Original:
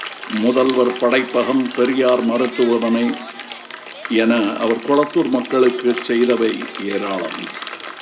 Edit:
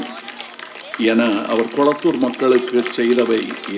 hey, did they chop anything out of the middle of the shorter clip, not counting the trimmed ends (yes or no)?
no